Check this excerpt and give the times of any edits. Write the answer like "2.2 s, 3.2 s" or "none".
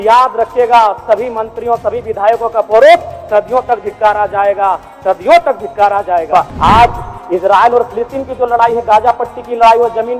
6.5 s